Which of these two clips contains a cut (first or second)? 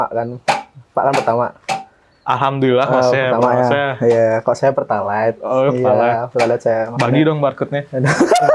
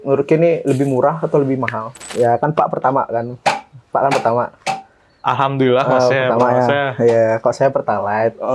second